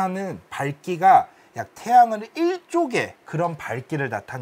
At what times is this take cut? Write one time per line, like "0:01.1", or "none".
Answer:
none